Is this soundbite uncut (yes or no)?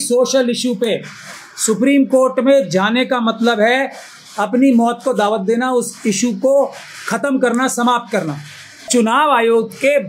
no